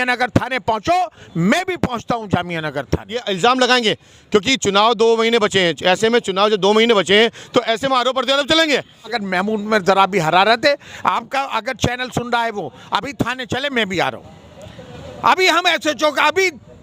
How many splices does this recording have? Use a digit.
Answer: 2